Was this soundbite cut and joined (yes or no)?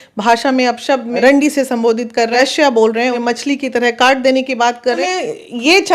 yes